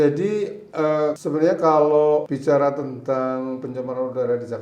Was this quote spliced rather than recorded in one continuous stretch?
yes; 2 cuts; at 1.2 s, 2.3 s

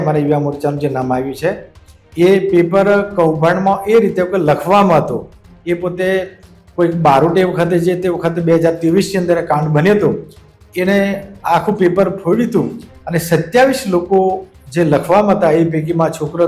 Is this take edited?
no; 0 cuts

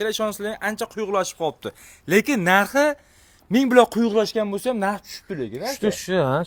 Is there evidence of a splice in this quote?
no; 0 cuts

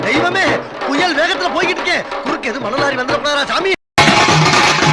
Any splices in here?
no; 0 cuts

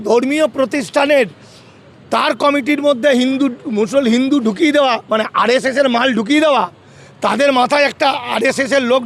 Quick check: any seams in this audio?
no; 0 cuts

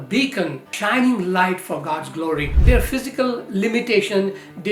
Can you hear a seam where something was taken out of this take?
yes; 1 cut; at 2.6 s

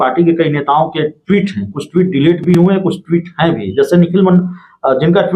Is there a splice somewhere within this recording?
no; 0 cuts

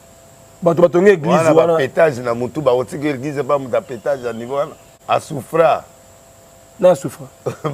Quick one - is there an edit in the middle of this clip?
yes; 1 cut; at 4.9 s

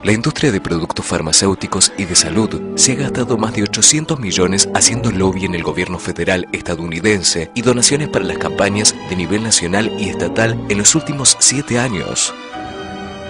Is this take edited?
no; 0 cuts

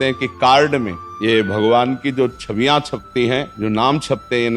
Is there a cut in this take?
yes; 2 cuts; at 1.0 s, 3.5 s

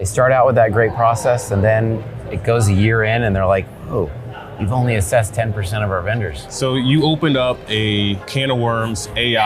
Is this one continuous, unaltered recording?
no; 2 cuts; at 6.4 s, 8.3 s

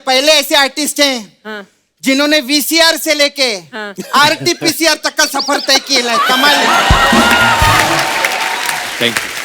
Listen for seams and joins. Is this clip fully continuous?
yes; 0 cuts

